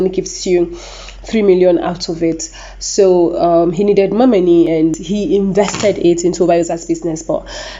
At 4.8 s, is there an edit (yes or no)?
yes